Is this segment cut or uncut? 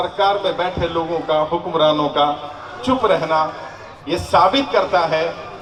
uncut